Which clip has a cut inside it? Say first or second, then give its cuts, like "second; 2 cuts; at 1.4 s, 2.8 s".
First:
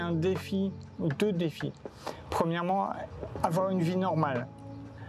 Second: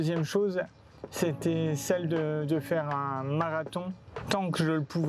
second; 1 cut; at 4.1 s